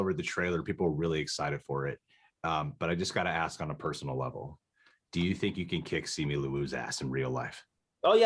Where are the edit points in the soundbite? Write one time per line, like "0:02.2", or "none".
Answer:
none